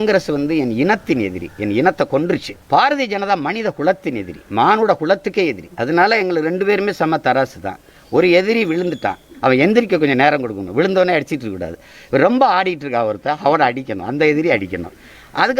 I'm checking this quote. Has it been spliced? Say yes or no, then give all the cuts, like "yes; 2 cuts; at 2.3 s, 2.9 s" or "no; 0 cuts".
yes; 1 cut; at 2.5 s